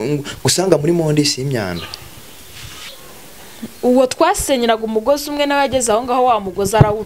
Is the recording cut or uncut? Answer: cut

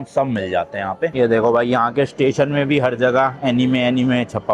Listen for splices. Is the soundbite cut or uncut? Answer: cut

